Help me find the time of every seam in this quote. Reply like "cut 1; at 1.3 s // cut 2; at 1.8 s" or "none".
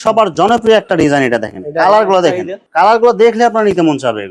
none